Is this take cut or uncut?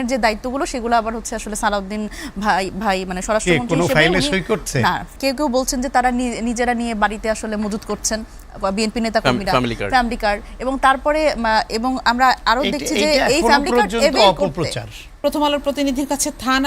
cut